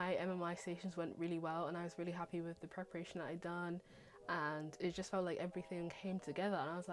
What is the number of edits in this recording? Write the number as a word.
zero